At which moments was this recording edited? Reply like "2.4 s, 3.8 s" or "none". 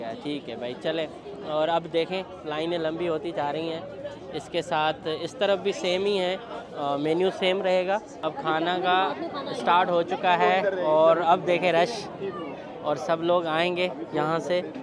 none